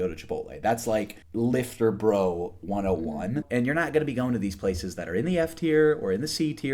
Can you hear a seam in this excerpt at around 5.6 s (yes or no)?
no